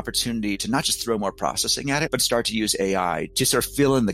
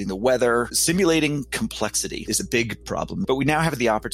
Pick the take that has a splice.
second; 1 cut; at 2.9 s

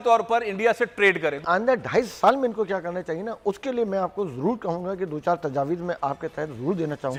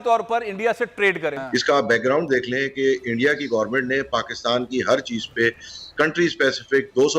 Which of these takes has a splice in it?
second; 1 cut; at 1.4 s

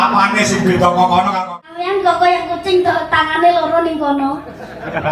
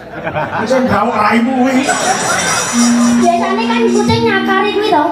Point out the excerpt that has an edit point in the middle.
first; 1 cut; at 1.4 s

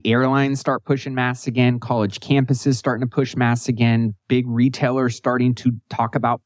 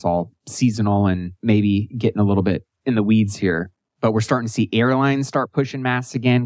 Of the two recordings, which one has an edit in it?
second; 2 cuts; at 1.3 s, 2.7 s

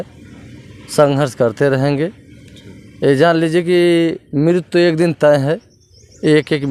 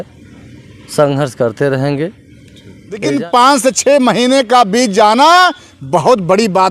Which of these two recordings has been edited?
second; 1 cut; at 3.0 s

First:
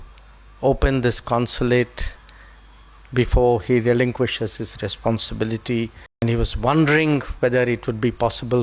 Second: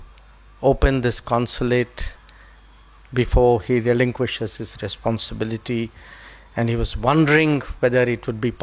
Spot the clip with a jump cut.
first; 1 cut; at 6.2 s

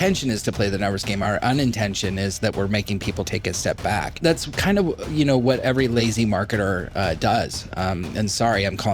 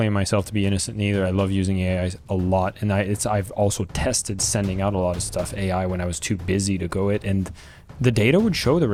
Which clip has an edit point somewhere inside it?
first; 4 cuts; at 1.2 s, 3.3 s, 4.2 s, 5.7 s

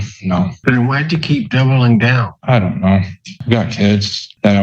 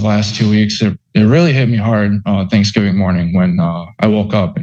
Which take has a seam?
first; 2 cuts; at 2.3 s, 3.4 s

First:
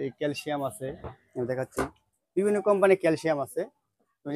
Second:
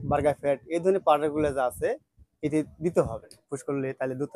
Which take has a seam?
second; 1 cut; at 3.4 s

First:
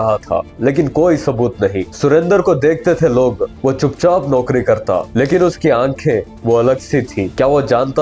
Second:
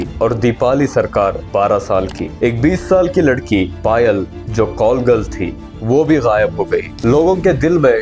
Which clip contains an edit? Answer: second; 1 cut; at 2.3 s

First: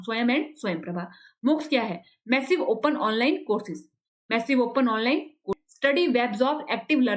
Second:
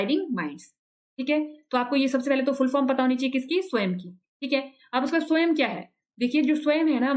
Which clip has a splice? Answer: first; 1 cut; at 5.6 s

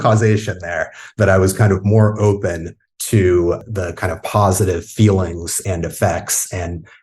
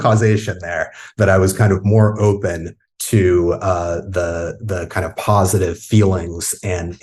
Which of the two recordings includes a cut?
first; 2 cuts; at 3.6 s, 5.6 s

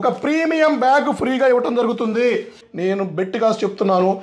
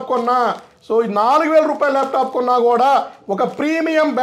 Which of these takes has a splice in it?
first; 1 cut; at 2.6 s

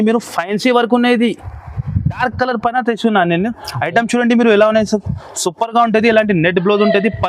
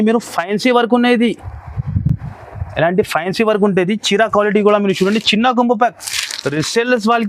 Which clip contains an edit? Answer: first; 1 cut; at 2.2 s

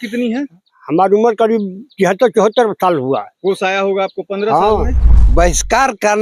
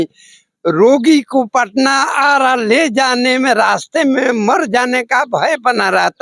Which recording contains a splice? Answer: first; 1 cut; at 5.0 s

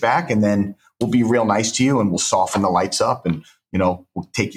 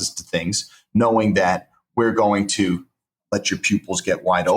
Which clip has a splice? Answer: second; 1 cut; at 3.2 s

